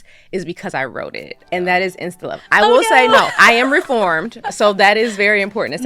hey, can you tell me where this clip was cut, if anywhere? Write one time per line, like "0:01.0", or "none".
0:01.3